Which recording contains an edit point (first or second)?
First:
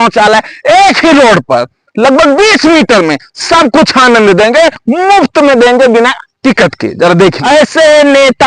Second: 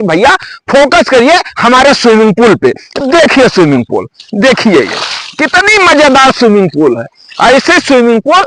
first